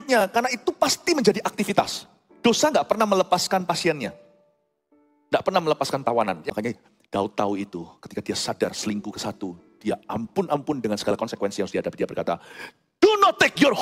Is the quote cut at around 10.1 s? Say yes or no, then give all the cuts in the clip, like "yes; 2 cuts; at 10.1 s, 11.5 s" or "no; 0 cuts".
no; 1 cut; at 6.4 s